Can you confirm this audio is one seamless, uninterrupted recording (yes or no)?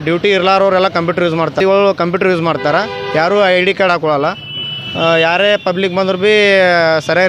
no